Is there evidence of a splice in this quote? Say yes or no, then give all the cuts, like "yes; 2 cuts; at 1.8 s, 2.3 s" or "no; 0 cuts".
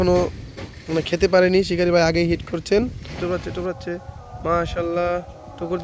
yes; 1 cut; at 3.1 s